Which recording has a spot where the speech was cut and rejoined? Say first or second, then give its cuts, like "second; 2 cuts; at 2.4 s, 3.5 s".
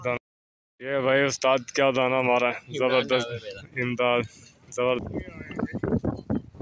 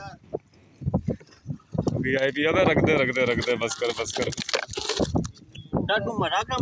first; 1 cut; at 5.0 s